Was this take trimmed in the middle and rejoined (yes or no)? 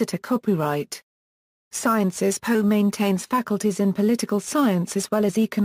no